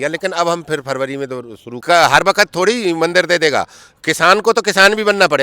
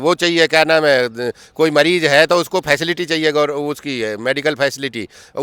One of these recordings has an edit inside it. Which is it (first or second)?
first